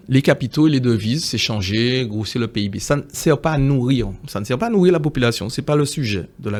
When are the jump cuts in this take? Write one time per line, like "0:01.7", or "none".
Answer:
none